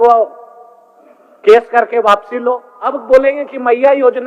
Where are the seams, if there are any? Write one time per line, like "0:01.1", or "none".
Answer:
0:03.0